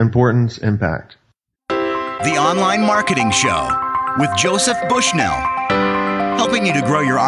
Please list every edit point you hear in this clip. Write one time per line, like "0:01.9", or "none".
0:01.5